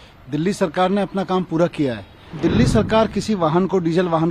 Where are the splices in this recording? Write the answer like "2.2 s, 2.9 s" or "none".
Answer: 2.4 s